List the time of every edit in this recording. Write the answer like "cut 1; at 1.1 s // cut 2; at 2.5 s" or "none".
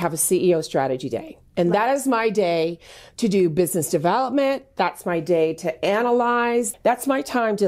cut 1; at 6.7 s